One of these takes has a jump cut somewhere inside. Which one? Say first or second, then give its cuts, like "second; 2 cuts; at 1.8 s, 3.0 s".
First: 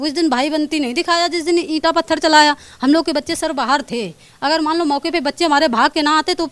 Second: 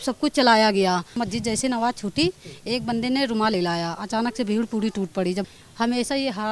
second; 2 cuts; at 1.1 s, 5.5 s